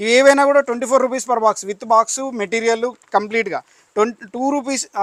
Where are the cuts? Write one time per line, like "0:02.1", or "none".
none